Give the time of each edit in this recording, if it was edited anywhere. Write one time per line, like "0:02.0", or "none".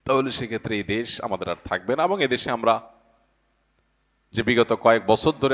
none